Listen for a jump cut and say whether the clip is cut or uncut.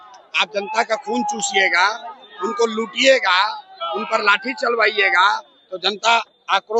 uncut